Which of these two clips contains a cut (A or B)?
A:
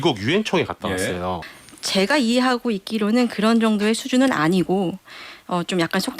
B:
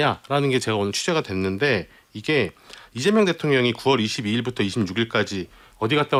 A